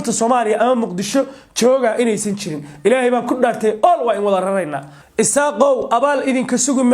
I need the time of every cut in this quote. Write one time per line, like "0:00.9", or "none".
0:05.0